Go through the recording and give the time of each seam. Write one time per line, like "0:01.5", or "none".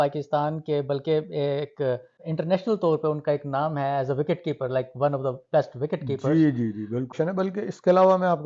0:02.1
0:07.1

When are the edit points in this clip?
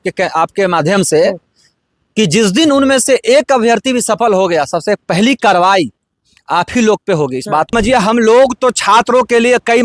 0:07.7

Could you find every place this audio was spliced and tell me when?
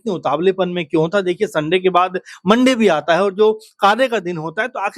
none

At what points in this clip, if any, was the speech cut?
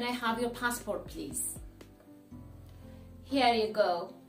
0:01.3
0:03.3

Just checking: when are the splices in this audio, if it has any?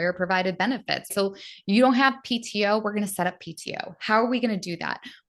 0:01.1

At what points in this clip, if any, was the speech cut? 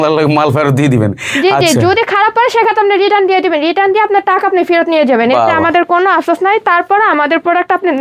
none

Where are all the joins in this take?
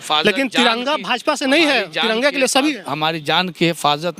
none

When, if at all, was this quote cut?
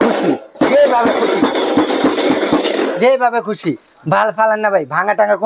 none

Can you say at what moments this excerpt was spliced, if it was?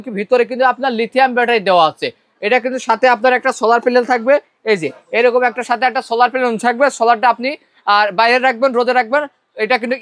none

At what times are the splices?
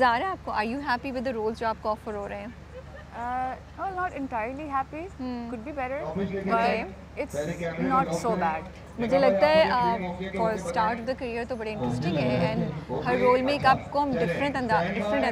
none

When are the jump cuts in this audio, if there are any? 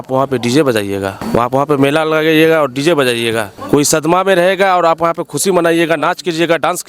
0:01.2
0:03.5

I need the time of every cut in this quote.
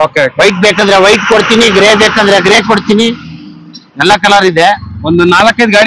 0:04.9

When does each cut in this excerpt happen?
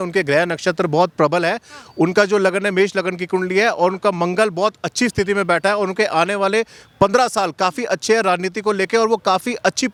none

